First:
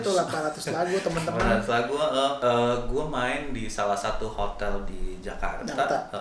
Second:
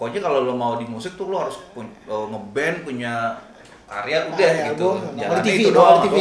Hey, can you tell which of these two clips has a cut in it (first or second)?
first